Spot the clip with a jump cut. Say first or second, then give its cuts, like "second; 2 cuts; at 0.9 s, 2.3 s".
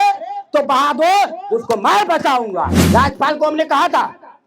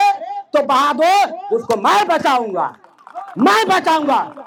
first; 1 cut; at 2.8 s